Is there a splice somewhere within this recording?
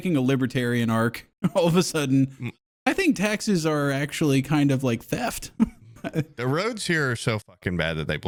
no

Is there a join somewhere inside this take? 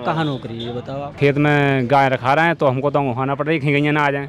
yes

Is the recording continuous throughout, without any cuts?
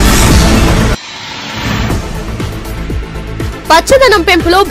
no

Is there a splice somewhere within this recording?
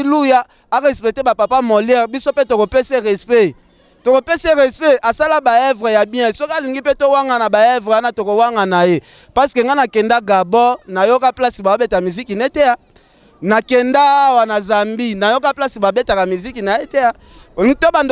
no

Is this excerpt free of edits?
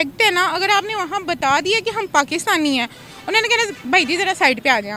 yes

